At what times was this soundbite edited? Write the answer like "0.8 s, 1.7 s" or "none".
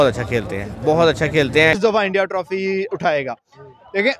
1.8 s